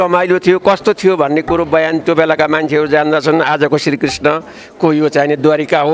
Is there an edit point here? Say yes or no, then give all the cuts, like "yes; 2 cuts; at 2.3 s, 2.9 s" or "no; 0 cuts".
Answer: no; 0 cuts